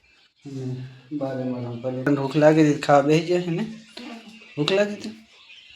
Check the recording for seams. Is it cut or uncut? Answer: cut